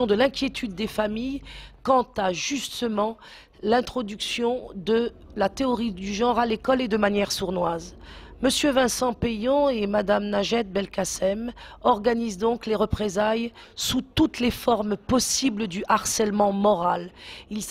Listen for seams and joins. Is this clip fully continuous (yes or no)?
no